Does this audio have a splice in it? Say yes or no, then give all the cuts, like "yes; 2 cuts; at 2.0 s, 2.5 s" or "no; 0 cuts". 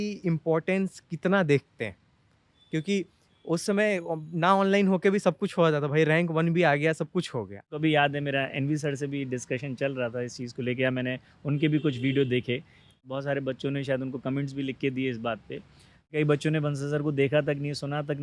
yes; 3 cuts; at 7.8 s, 13.1 s, 16.1 s